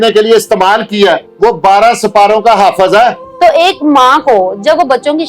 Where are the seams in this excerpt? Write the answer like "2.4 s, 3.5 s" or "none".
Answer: 1.3 s, 3.2 s